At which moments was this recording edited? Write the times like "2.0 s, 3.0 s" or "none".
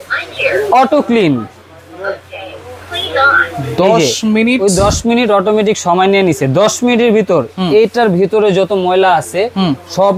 none